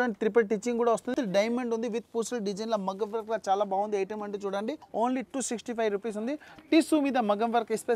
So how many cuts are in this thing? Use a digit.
3